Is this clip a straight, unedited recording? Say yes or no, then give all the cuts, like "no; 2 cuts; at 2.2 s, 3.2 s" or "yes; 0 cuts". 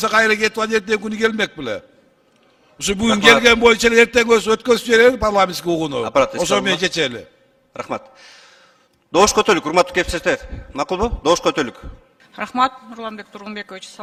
yes; 0 cuts